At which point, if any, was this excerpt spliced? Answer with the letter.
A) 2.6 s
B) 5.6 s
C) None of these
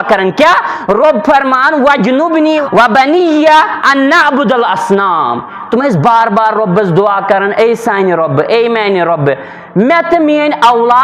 A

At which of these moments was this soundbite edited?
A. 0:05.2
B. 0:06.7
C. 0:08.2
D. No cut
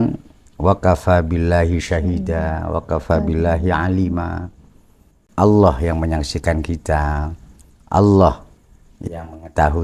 A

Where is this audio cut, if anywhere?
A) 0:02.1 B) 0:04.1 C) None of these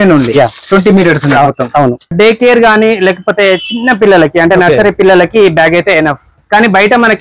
A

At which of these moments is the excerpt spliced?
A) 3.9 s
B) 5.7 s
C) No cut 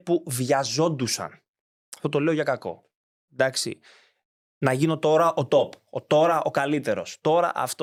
C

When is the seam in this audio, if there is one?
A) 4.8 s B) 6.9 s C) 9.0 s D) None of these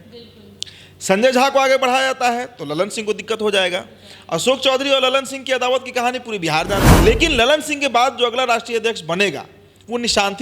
B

